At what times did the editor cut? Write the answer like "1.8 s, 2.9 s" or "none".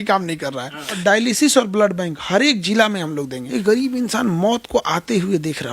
0.9 s, 3.4 s